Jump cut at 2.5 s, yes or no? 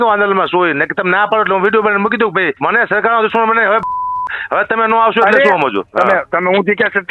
yes